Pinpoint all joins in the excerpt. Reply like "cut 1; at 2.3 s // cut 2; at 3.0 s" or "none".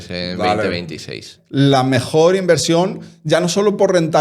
cut 1; at 1.3 s